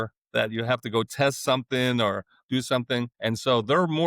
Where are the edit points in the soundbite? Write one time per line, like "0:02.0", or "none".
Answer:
0:03.1

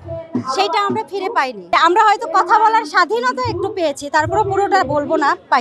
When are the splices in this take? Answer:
0:01.6

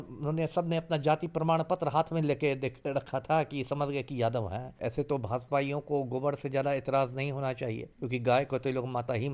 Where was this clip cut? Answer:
0:04.8
0:07.9

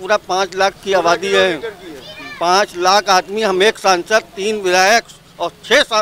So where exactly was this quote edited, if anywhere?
none

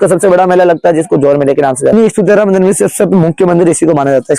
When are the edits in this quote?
0:01.9

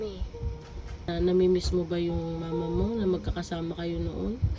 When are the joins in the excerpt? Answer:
0:01.0

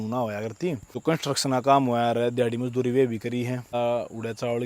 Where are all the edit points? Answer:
0:00.9
0:03.7

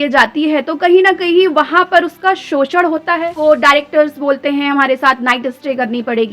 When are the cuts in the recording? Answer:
0:03.3

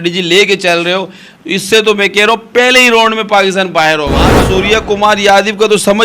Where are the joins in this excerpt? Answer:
0:04.4

